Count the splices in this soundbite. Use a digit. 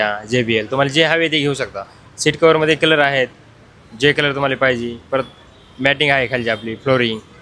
0